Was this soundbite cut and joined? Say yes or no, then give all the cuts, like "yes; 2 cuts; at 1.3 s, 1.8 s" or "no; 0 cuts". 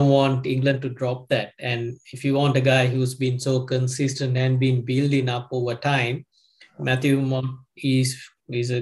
no; 0 cuts